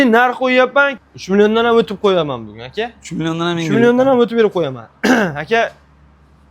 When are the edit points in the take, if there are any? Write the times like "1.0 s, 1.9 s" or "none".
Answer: 1.0 s